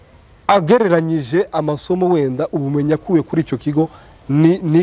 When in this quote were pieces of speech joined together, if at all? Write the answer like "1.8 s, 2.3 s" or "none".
none